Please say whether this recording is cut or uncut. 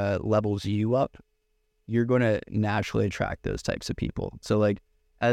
uncut